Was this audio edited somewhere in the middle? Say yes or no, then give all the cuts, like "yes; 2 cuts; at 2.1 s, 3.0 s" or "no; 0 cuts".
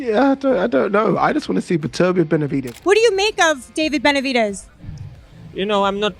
yes; 1 cut; at 2.7 s